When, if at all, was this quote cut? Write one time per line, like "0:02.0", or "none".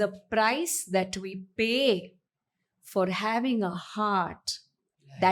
none